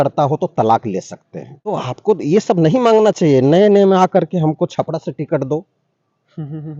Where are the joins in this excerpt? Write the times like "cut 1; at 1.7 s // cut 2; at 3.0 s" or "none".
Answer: cut 1; at 1.7 s